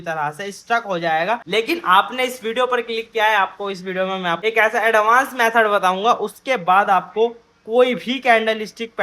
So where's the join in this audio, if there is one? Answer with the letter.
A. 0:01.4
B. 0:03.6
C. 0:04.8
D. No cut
A